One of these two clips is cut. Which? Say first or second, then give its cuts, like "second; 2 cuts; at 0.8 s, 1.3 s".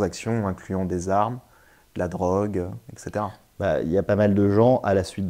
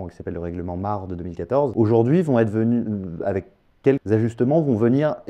second; 2 cuts; at 1.7 s, 4.0 s